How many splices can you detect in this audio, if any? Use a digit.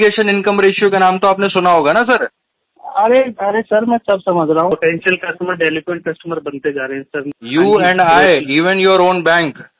2